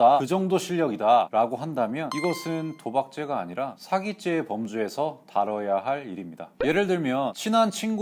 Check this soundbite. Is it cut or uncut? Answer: cut